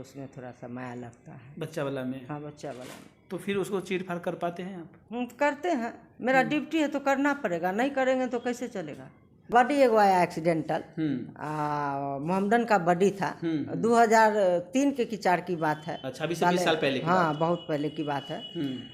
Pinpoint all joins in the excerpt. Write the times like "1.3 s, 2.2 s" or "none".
9.5 s